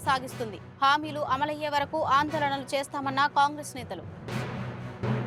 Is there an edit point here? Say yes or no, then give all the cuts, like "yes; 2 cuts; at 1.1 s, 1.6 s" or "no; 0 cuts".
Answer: no; 0 cuts